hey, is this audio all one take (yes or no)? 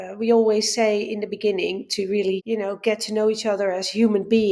no